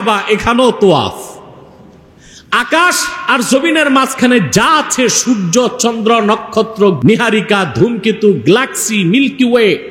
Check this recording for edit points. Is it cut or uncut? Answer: cut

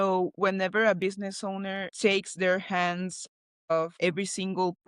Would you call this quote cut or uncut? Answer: uncut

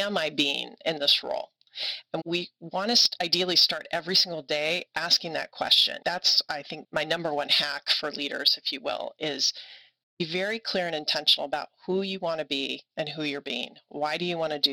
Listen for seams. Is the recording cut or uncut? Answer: cut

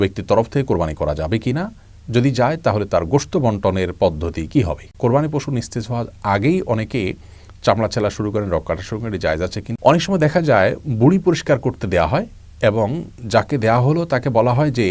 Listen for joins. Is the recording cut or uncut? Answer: cut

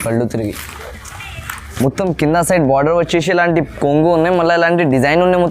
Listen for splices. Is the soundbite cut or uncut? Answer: cut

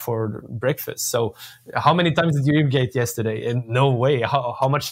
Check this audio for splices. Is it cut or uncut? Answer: uncut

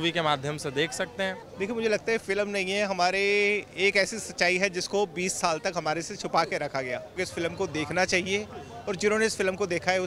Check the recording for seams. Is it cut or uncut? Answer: cut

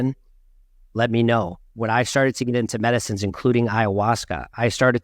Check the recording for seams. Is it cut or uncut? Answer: cut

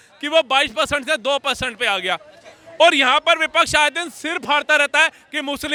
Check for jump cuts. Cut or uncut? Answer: uncut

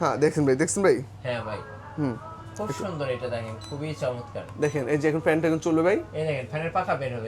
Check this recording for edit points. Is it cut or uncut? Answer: uncut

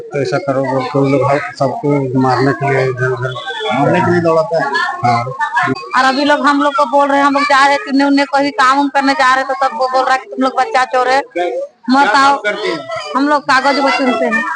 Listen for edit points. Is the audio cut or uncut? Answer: cut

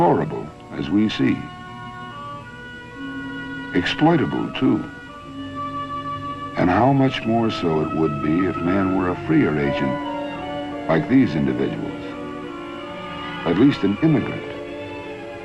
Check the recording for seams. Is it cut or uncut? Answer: cut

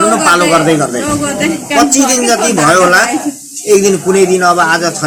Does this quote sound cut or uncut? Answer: uncut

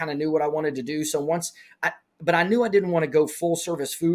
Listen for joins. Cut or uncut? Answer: uncut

